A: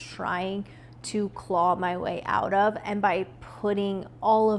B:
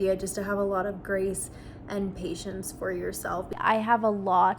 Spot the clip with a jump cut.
B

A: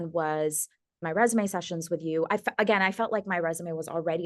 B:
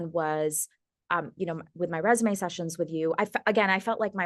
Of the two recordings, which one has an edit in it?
A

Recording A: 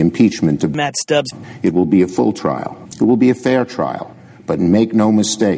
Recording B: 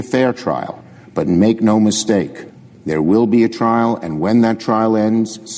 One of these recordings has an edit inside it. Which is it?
A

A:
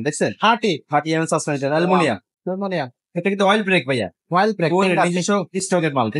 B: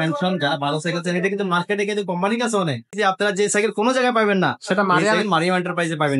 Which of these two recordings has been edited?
B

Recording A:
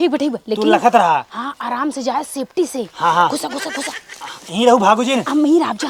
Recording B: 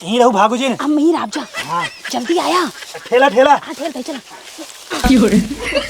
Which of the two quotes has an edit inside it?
B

